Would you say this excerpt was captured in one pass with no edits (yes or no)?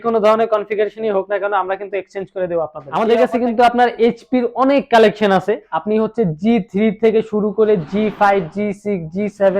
no